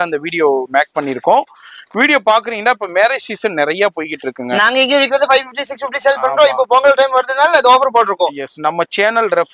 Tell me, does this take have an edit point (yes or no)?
no